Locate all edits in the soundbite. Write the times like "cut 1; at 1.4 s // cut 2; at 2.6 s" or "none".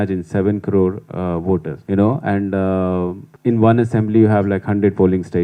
cut 1; at 1.7 s // cut 2; at 3.3 s